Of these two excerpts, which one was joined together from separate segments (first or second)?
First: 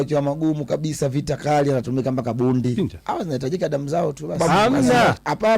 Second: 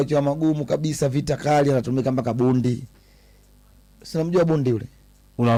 first